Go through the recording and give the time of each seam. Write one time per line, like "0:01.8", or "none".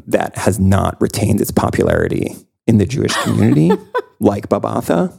none